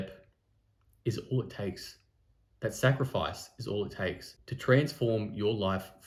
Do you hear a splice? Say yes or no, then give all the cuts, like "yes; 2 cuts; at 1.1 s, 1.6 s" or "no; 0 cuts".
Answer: no; 0 cuts